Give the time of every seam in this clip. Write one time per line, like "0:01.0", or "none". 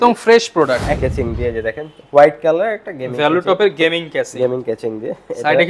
0:01.0

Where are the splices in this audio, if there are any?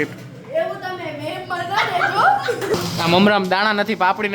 0:02.7

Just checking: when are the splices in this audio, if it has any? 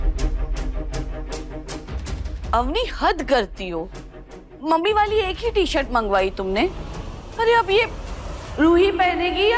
none

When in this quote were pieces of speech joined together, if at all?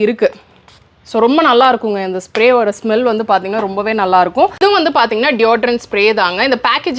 0:04.6

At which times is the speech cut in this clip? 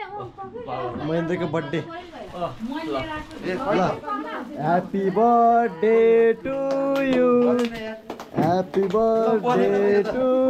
none

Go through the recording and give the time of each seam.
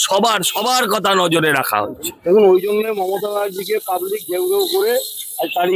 0:02.1

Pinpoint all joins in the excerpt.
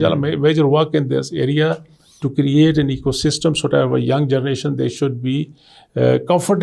none

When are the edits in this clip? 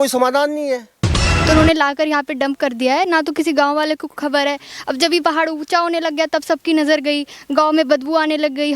0:01.2

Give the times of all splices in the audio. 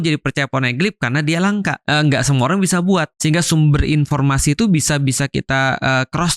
0:01.8
0:03.1

